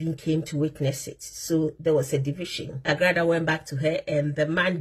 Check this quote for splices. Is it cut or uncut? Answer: cut